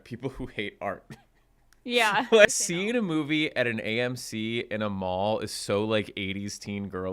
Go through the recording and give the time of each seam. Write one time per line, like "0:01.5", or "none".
0:02.5